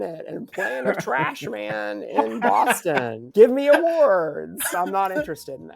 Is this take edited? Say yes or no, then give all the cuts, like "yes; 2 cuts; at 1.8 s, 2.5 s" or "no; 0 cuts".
yes; 1 cut; at 4.7 s